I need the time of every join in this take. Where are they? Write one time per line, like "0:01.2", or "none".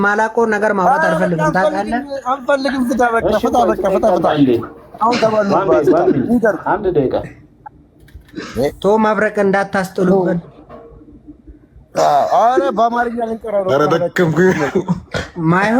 none